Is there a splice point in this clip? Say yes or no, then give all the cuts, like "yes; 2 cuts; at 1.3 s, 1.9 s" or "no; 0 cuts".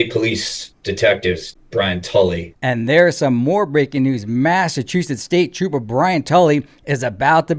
yes; 2 cuts; at 1.5 s, 2.5 s